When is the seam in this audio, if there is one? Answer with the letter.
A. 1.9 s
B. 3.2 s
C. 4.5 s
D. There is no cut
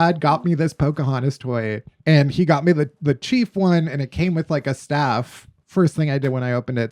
A